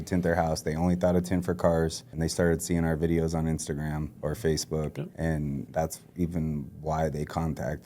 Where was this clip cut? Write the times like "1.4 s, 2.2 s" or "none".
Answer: 2.0 s, 4.1 s, 5.4 s